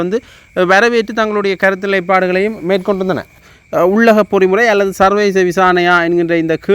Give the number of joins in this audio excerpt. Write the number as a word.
one